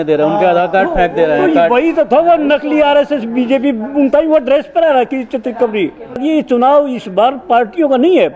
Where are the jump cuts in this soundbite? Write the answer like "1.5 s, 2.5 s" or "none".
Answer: 6.2 s